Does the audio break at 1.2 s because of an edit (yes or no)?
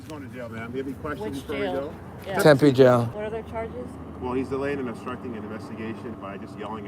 no